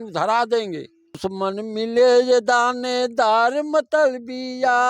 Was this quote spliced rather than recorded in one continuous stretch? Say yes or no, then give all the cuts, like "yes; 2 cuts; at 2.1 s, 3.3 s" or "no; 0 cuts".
yes; 1 cut; at 1.2 s